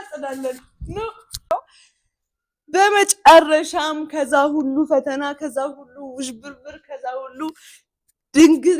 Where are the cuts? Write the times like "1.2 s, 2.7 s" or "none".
1.5 s